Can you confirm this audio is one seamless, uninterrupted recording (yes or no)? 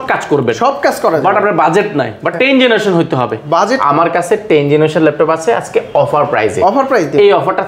yes